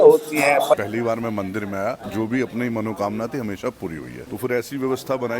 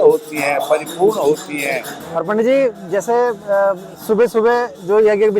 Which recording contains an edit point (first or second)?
first